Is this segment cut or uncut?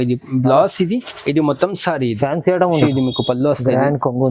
cut